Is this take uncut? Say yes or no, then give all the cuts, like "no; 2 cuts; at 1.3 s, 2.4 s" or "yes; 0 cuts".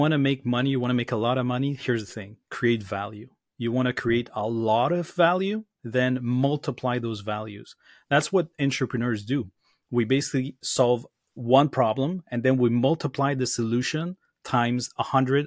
yes; 0 cuts